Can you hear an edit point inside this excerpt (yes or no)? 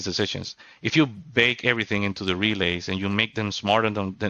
no